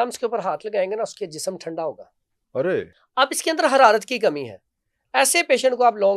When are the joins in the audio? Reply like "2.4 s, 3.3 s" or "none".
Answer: 3.0 s

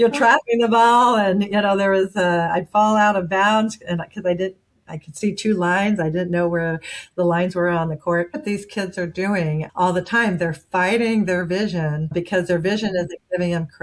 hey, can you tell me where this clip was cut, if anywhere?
8.4 s, 12.0 s

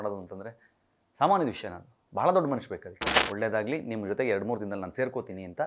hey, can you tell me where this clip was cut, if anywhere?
3.1 s

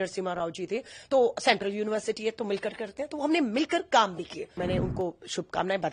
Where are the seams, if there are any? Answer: 4.4 s

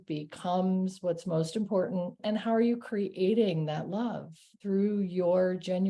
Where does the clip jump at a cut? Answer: 2.2 s, 4.6 s

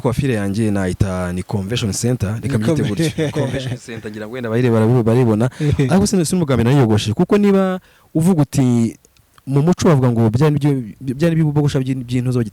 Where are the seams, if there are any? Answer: none

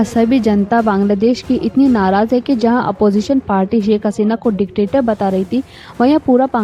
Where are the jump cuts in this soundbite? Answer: none

